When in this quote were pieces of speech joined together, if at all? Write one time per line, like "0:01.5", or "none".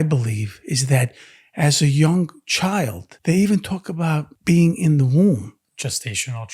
0:03.1
0:04.3
0:05.6